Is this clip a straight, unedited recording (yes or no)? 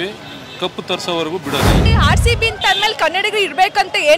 no